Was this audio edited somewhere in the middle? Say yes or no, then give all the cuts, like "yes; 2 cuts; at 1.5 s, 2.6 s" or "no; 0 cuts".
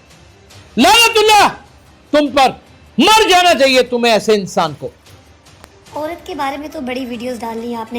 yes; 1 cut; at 5.5 s